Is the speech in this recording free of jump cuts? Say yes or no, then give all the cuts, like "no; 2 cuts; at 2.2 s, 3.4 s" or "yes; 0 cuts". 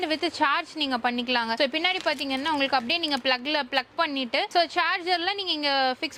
yes; 0 cuts